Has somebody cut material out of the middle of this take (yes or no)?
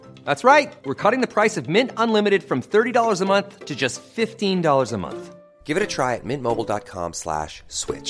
no